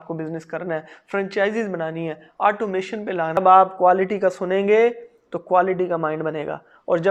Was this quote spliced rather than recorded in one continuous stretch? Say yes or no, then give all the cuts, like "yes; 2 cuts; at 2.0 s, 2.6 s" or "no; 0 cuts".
yes; 1 cut; at 3.4 s